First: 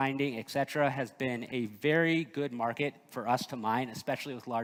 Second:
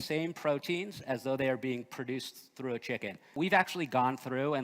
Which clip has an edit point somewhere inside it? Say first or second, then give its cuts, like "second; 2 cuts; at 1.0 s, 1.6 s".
second; 1 cut; at 3.3 s